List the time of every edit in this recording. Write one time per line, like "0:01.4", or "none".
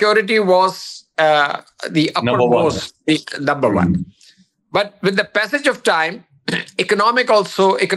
none